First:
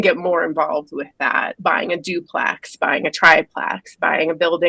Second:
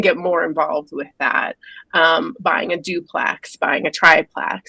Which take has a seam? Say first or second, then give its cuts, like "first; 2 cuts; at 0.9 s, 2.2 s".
first; 1 cut; at 1.5 s